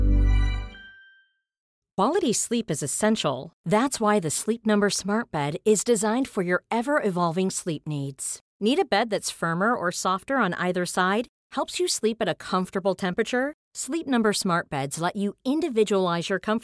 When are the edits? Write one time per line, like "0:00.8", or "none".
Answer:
0:01.6